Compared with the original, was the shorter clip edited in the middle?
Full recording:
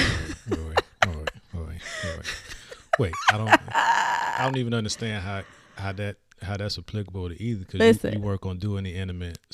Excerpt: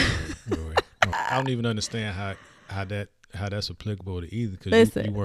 yes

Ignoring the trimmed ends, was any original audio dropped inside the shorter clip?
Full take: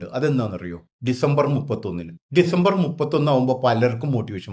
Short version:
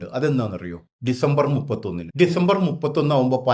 yes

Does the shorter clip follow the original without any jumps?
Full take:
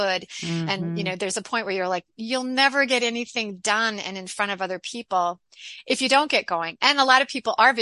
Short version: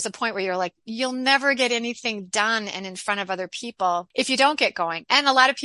no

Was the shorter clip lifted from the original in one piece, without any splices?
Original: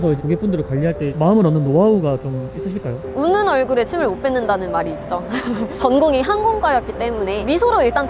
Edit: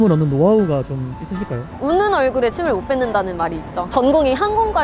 no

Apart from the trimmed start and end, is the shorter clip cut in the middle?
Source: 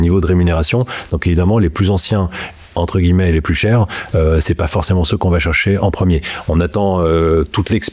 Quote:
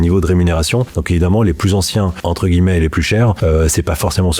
yes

